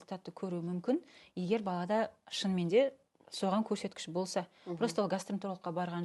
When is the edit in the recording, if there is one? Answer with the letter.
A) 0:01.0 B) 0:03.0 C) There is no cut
C